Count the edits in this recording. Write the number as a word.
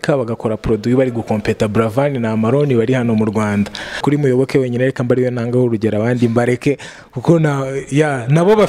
one